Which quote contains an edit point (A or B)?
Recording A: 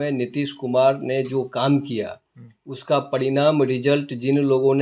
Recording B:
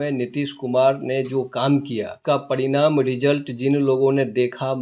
B